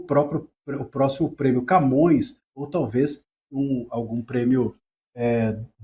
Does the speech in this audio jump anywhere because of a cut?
no; 0 cuts

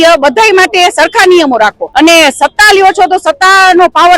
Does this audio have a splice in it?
yes; 1 cut; at 1.8 s

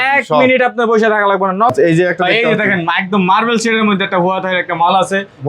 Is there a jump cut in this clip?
yes; 1 cut; at 1.7 s

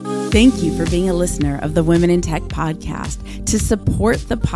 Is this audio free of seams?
yes; 0 cuts

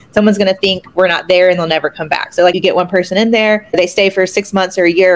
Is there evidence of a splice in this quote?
yes; 2 cuts; at 2.6 s, 3.8 s

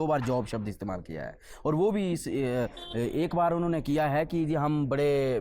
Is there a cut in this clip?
no; 0 cuts

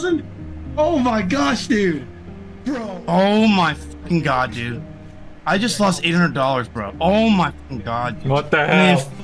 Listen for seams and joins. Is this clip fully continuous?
yes; 0 cuts

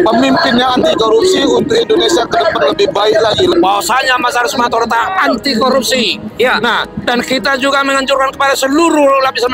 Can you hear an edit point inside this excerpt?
yes; 1 cut; at 3.5 s

